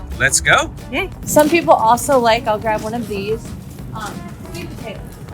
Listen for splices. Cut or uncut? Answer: cut